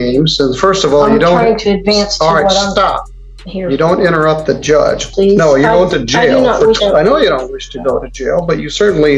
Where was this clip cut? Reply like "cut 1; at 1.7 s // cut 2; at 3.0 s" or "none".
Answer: cut 1; at 5.1 s // cut 2; at 6.8 s